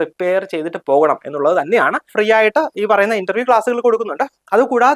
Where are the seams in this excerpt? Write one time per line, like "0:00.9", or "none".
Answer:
0:02.1